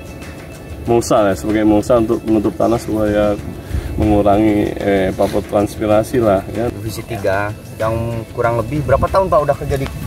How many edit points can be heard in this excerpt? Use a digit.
1